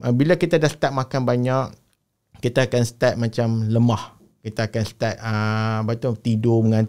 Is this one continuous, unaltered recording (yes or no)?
yes